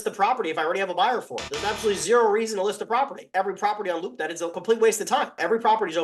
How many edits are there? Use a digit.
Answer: 2